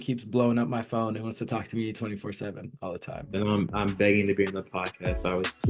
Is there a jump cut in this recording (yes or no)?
no